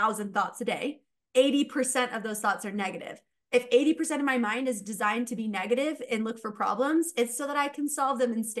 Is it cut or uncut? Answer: cut